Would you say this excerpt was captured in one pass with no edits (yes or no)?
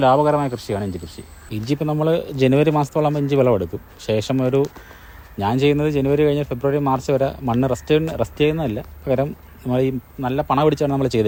yes